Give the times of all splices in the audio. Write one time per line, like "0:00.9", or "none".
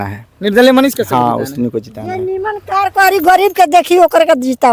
none